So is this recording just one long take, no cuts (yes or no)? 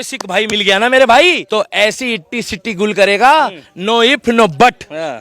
no